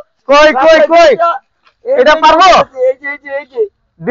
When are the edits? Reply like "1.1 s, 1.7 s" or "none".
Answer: none